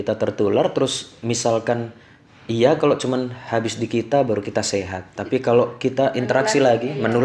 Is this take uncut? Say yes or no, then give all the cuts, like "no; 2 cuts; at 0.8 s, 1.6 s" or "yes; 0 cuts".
yes; 0 cuts